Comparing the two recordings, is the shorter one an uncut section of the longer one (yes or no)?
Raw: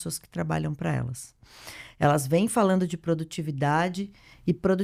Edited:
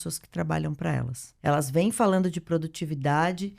no